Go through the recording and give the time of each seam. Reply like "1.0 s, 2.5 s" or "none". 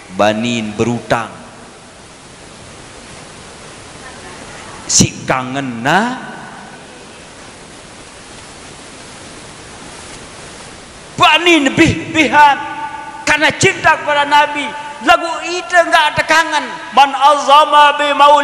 11.0 s